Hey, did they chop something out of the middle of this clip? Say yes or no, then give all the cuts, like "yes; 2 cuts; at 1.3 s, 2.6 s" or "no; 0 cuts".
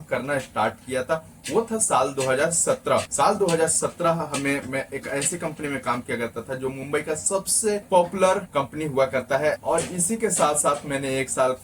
yes; 4 cuts; at 3.1 s, 7.8 s, 8.5 s, 9.6 s